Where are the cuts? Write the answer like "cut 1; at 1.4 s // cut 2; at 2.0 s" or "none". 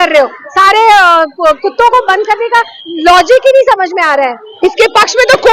cut 1; at 4.4 s